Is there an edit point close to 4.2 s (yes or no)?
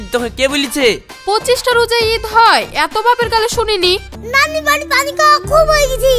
yes